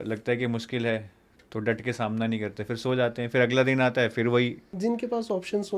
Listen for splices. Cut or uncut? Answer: cut